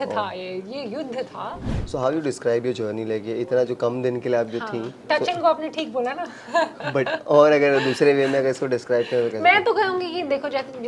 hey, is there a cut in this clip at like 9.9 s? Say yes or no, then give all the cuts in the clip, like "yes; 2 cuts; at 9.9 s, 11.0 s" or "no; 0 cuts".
no; 1 cut; at 1.7 s